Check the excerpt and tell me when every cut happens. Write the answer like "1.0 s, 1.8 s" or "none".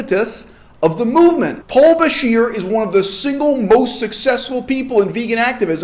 1.6 s